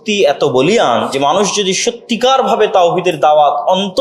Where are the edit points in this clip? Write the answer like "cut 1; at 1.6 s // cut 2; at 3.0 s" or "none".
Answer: cut 1; at 1.1 s